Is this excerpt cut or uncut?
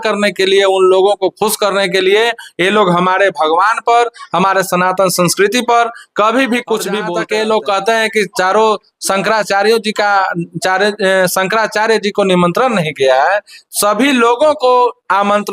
cut